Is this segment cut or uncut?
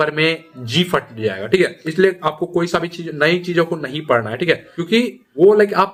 uncut